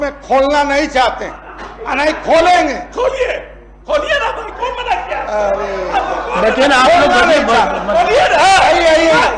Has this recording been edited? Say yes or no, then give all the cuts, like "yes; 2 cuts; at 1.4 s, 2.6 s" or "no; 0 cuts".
no; 0 cuts